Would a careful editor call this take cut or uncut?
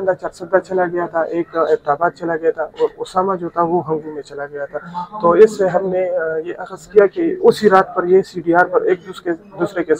uncut